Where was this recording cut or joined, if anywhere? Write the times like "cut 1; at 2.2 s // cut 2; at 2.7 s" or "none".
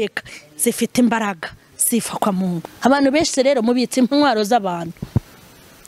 cut 1; at 2.7 s